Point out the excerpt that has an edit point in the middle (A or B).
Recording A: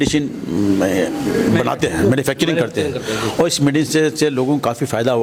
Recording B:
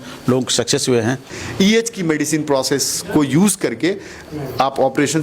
B